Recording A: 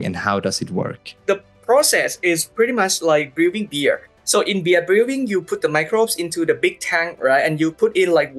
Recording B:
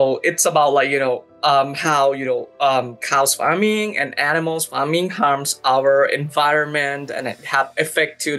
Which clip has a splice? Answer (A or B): A